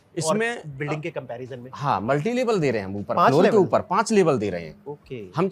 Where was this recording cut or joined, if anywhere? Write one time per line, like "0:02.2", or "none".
0:01.7